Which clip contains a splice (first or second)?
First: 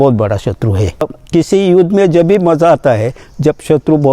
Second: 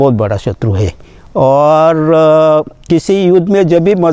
first